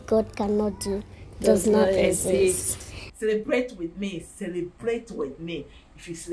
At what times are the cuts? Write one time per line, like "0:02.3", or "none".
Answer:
0:03.1

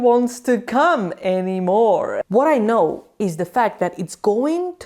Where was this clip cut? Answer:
0:02.2

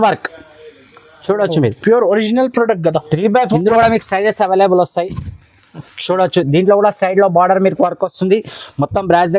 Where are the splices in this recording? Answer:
0:03.5

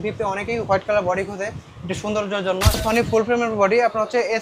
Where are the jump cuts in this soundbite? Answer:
0:02.8

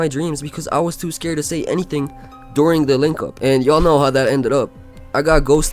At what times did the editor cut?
0:03.3

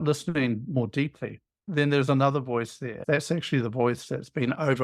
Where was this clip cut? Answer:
0:03.0

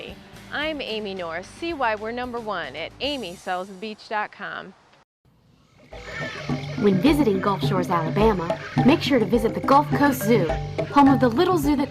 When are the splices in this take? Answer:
0:05.2

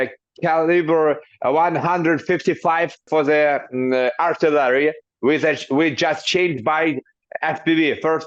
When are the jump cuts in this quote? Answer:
none

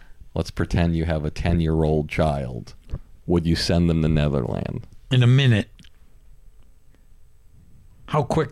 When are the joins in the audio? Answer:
none

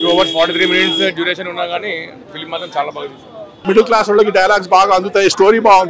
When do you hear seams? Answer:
0:03.6

